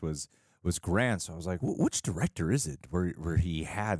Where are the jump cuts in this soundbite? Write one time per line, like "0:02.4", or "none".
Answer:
0:01.6